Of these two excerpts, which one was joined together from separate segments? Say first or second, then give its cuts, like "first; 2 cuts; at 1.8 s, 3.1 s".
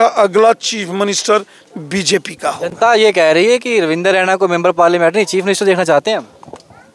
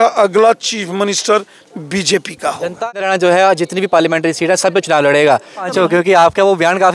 second; 2 cuts; at 2.8 s, 5.7 s